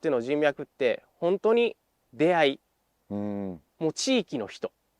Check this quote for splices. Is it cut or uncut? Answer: uncut